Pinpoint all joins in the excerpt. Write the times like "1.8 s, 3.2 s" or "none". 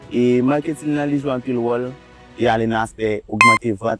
2.2 s